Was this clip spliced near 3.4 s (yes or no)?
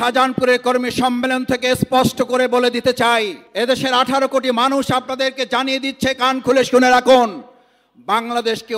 yes